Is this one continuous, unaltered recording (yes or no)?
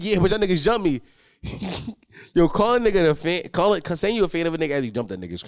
yes